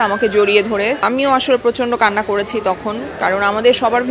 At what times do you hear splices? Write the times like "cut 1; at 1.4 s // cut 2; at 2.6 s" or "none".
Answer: cut 1; at 1.1 s